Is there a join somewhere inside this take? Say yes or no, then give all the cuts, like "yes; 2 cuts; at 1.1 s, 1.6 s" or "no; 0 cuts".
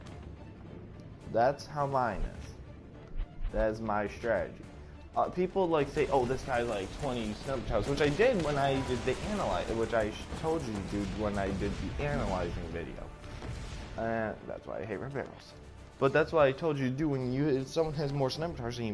yes; 1 cut; at 14.8 s